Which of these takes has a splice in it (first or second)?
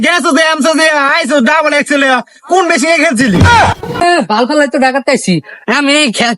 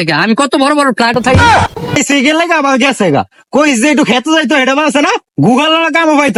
first